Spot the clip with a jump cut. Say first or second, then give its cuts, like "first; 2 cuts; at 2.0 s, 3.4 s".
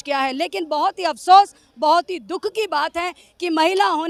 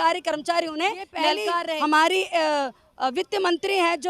second; 1 cut; at 1.5 s